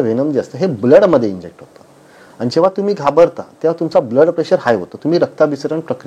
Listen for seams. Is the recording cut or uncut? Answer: uncut